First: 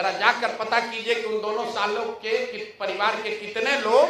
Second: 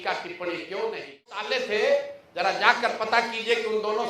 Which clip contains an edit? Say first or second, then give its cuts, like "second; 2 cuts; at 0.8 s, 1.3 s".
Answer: second; 1 cut; at 1.5 s